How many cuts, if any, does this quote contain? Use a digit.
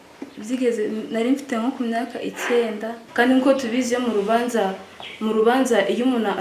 1